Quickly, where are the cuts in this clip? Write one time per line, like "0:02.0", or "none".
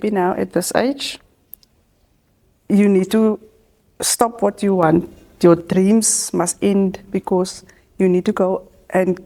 none